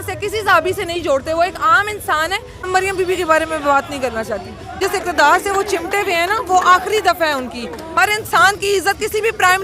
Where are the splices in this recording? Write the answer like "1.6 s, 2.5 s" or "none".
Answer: 2.6 s, 4.8 s, 7.9 s